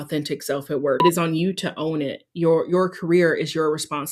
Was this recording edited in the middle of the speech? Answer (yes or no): yes